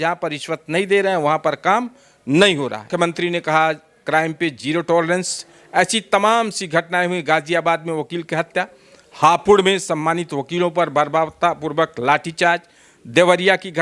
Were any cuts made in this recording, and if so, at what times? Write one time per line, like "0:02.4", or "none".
0:02.8